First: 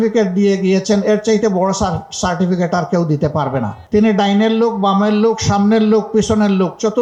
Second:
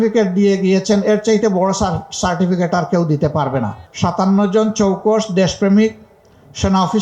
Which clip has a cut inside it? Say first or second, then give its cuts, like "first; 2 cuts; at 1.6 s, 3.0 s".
second; 1 cut; at 3.8 s